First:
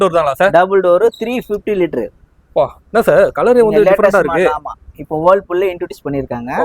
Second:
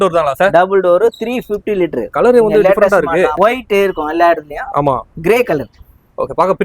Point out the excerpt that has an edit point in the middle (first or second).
second